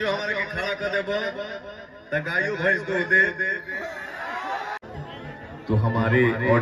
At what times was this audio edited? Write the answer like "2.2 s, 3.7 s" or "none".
4.8 s